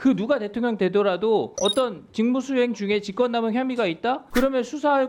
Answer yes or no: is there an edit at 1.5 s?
yes